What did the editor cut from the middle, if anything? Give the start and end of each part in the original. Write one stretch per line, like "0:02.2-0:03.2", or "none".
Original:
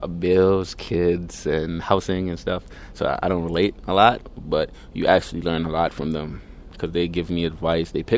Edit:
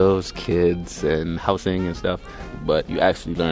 0:03.0-0:04.6